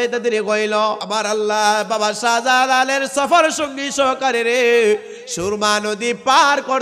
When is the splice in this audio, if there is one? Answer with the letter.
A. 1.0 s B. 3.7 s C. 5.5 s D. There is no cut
A